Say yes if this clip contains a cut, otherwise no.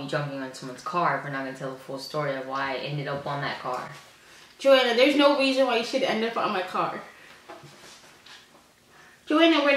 no